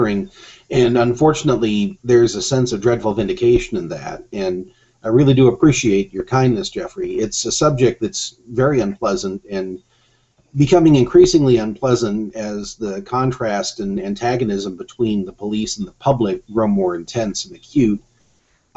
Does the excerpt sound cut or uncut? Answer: uncut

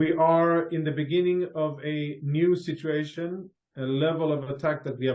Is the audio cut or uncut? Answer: uncut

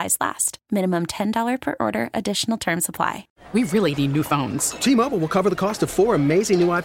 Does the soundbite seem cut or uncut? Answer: uncut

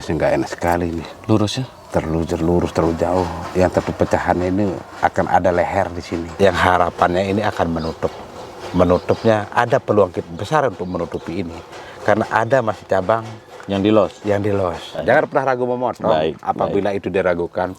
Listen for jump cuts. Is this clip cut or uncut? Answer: cut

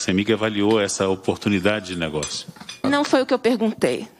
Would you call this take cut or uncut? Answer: cut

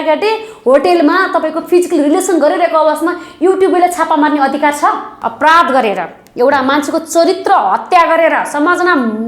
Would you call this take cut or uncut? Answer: cut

